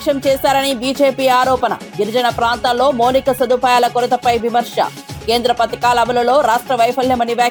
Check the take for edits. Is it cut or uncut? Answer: uncut